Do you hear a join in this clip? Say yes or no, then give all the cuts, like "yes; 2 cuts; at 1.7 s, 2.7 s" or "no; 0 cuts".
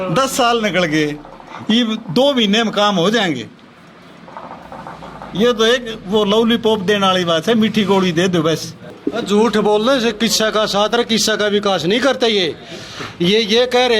yes; 1 cut; at 9.0 s